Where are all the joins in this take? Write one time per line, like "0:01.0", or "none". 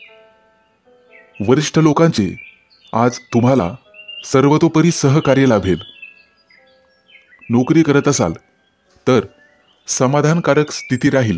0:00.9